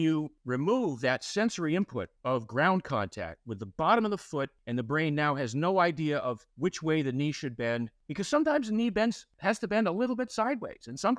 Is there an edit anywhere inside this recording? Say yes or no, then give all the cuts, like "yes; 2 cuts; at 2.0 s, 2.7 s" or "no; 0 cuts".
no; 0 cuts